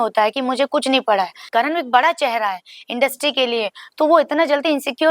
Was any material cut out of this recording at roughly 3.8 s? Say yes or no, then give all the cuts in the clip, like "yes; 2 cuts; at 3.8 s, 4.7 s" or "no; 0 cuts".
no; 1 cut; at 1.4 s